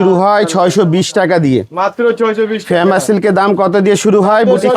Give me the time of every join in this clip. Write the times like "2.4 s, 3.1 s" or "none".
none

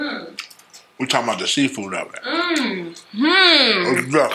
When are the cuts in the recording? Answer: none

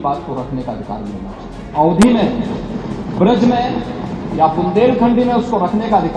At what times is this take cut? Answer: none

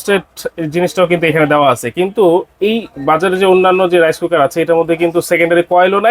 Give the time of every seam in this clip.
none

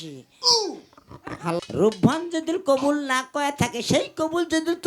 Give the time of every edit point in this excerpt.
1.6 s

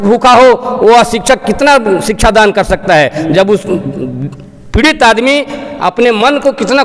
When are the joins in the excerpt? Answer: none

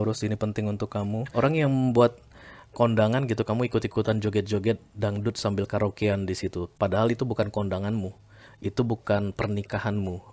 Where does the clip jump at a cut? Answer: 1.3 s

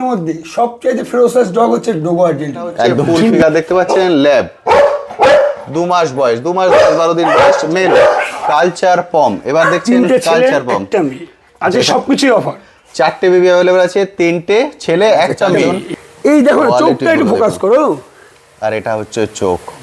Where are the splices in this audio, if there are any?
3.4 s, 8.4 s, 15.8 s

